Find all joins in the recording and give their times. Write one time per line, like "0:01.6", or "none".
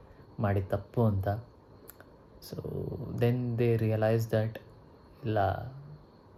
none